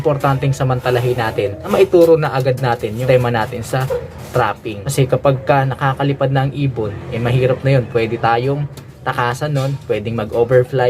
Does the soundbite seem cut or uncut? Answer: cut